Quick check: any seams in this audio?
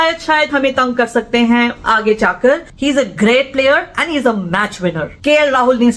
yes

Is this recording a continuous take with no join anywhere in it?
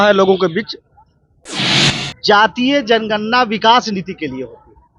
no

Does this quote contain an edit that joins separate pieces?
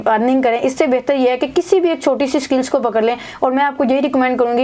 no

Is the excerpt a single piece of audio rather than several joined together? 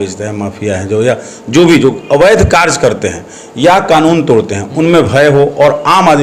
yes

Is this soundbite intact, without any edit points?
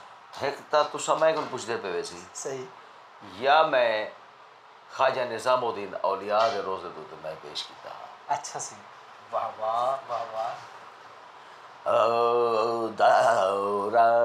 yes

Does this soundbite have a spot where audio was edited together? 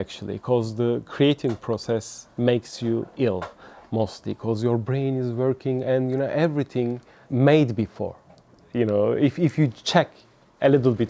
no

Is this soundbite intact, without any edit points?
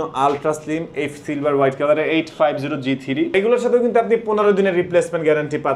no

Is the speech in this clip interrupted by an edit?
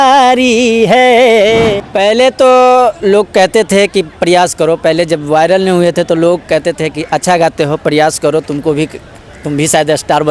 yes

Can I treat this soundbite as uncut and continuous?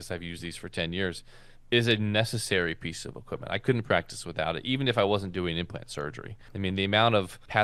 yes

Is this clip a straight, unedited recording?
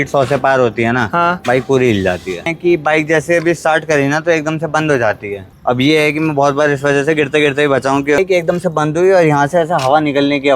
no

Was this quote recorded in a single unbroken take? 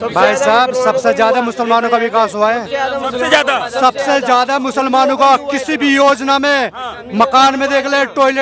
yes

